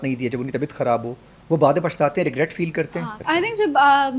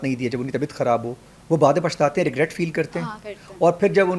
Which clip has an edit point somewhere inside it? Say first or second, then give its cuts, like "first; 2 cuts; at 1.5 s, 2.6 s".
first; 1 cut; at 3.1 s